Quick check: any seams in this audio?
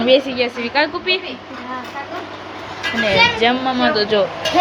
no; 0 cuts

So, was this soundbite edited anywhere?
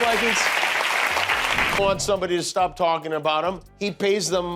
yes; 1 cut; at 1.7 s

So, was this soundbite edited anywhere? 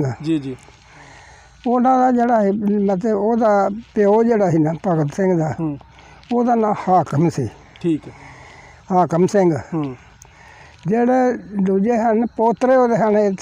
no; 0 cuts

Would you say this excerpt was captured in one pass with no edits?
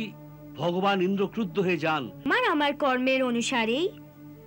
no; 1 cut; at 2.3 s

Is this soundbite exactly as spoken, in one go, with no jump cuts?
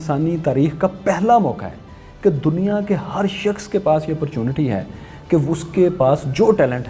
yes; 0 cuts

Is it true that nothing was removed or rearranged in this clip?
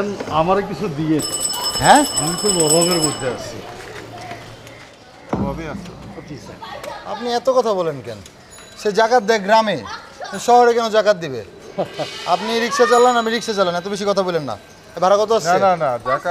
yes; 0 cuts

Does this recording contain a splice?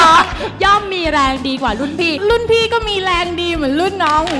yes; 1 cut; at 2.2 s

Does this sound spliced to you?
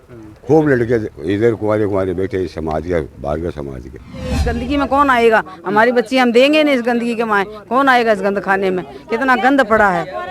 yes; 1 cut; at 4.3 s

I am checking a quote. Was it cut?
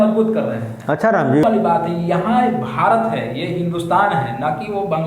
yes; 1 cut; at 1.4 s

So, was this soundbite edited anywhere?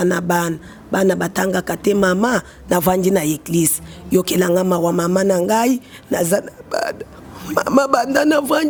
no; 0 cuts

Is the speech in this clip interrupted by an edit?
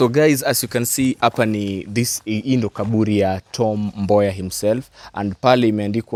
no; 0 cuts

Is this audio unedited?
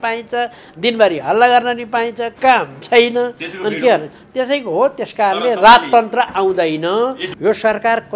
no; 1 cut; at 7.3 s

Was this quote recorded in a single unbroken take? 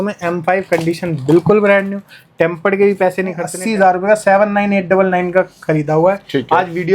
no; 1 cut; at 3.4 s

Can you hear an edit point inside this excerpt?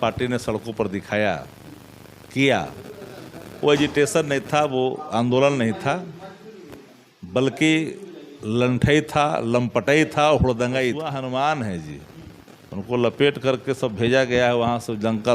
yes; 1 cut; at 11.0 s

